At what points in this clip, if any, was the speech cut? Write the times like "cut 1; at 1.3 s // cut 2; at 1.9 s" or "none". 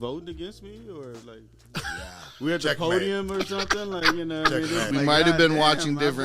cut 1; at 4.9 s